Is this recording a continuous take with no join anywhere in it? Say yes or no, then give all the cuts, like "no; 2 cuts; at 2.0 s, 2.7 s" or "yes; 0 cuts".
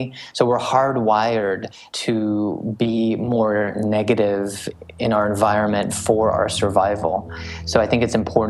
yes; 0 cuts